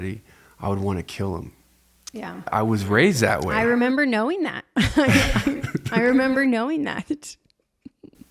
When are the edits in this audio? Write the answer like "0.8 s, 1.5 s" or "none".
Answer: 2.5 s